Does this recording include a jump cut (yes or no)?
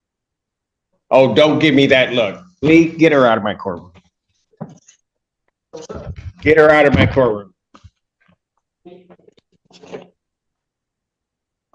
no